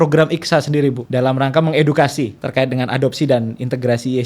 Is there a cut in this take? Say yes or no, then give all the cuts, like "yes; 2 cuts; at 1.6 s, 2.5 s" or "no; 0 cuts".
yes; 2 cuts; at 1.0 s, 2.4 s